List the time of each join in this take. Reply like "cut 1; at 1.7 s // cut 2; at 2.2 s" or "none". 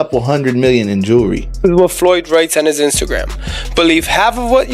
cut 1; at 1.6 s